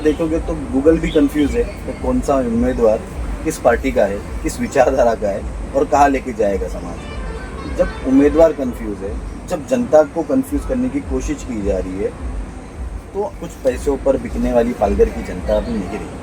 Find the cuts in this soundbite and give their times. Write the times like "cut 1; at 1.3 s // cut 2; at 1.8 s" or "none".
cut 1; at 13.3 s